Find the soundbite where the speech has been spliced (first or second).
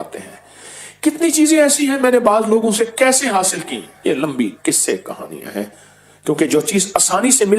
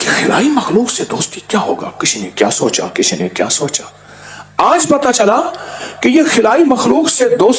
first